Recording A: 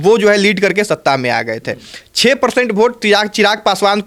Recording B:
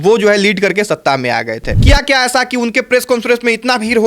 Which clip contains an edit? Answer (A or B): B